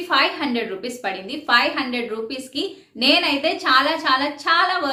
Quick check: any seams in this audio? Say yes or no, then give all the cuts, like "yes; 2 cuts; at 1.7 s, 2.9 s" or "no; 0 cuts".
no; 0 cuts